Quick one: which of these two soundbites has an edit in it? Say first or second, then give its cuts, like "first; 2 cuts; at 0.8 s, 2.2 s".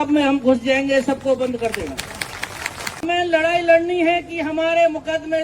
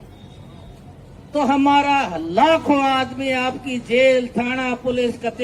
first; 1 cut; at 3.0 s